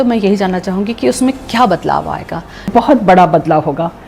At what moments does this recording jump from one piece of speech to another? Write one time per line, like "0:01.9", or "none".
0:02.6